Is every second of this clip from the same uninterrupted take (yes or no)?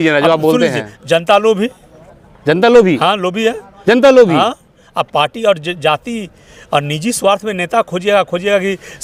yes